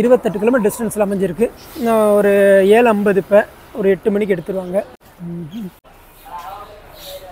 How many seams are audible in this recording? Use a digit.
0